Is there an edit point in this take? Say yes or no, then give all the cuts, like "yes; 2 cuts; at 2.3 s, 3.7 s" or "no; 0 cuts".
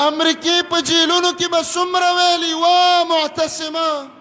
no; 0 cuts